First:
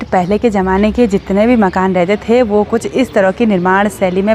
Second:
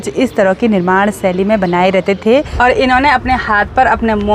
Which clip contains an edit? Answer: second; 1 cut; at 2.5 s

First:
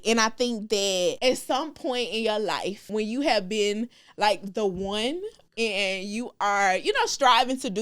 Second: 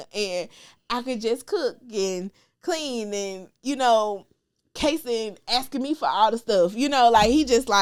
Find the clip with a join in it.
first; 3 cuts; at 1.2 s, 2.9 s, 5.4 s

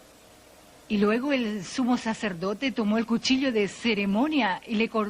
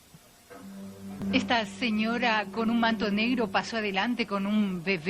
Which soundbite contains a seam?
second; 1 cut; at 1.2 s

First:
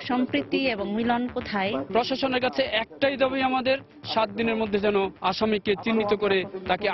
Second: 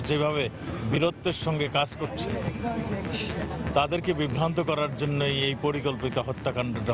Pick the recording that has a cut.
first; 2 cuts; at 1.8 s, 5.1 s

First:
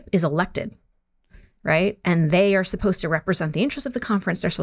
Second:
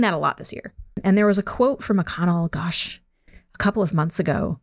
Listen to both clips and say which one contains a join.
second; 1 cut; at 1.0 s

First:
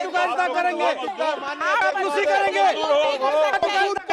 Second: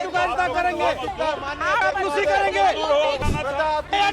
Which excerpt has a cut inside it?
second; 1 cut; at 3.2 s

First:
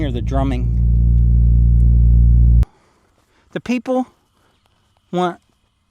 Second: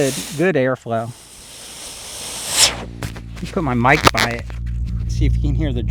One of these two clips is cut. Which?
first; 1 cut; at 2.6 s

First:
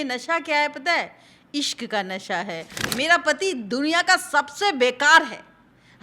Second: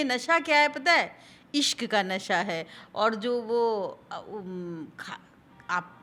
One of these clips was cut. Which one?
first; 1 cut; at 2.8 s

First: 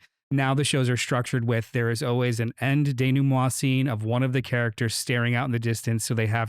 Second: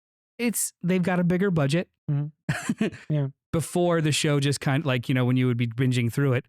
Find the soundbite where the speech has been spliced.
second; 1 cut; at 3.3 s

